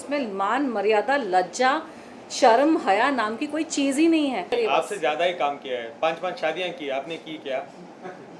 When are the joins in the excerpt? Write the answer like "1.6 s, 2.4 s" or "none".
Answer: 4.5 s